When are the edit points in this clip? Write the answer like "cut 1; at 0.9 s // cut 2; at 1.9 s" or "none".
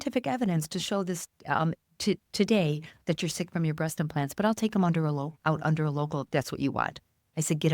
cut 1; at 6.3 s